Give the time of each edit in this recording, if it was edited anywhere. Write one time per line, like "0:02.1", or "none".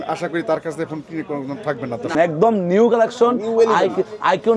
0:02.1